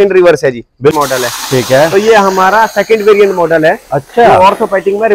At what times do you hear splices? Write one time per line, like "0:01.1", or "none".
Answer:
0:00.9